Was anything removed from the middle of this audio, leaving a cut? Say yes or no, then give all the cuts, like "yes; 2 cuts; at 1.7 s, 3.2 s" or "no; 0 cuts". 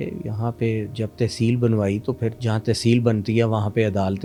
no; 0 cuts